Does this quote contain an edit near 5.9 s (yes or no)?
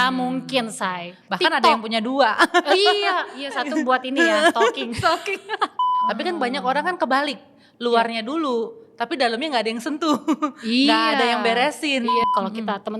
yes